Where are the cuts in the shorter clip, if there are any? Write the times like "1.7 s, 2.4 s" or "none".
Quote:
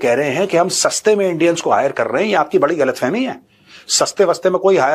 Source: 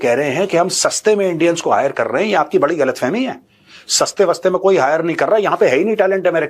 none